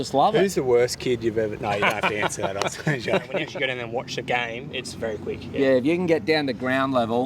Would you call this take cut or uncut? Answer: cut